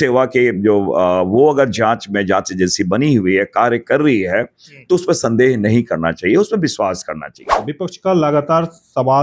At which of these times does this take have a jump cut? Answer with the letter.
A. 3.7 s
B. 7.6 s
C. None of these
B